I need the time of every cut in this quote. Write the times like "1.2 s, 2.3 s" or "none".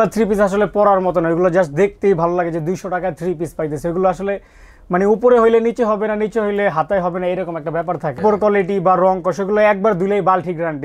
8.2 s